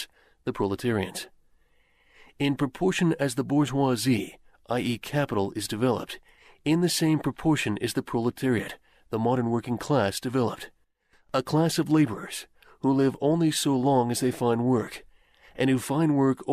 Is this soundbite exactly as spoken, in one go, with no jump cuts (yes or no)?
yes